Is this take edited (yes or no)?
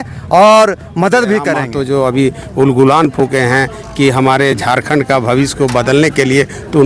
yes